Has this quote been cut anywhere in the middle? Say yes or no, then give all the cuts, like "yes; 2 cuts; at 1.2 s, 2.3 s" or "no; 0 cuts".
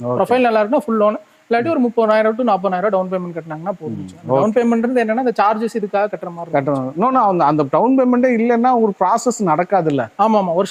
no; 0 cuts